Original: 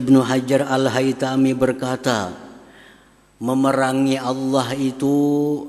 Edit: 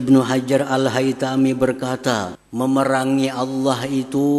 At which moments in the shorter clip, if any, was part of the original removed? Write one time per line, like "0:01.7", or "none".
0:02.4